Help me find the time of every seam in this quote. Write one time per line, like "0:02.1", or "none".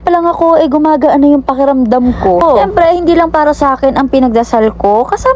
0:02.4